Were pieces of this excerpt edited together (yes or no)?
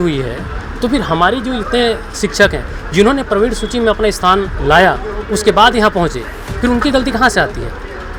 no